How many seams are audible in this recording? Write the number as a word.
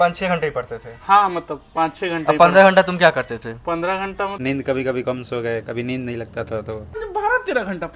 two